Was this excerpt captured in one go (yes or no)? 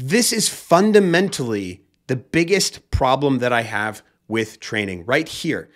yes